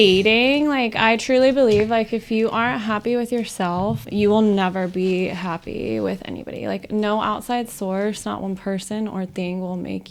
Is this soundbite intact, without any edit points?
no; 1 cut; at 4.1 s

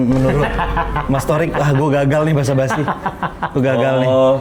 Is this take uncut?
yes; 0 cuts

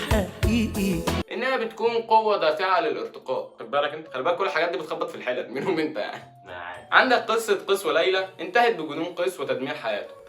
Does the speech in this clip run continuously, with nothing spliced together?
no; 2 cuts; at 1.2 s, 6.8 s

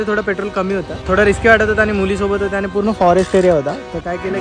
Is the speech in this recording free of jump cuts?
no; 1 cut; at 1.0 s

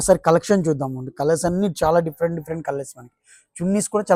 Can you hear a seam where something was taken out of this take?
no; 0 cuts

